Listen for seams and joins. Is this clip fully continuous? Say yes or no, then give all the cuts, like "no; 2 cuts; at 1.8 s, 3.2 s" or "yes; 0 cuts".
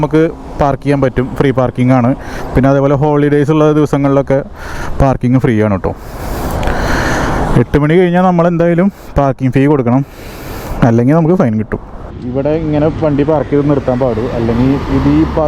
yes; 0 cuts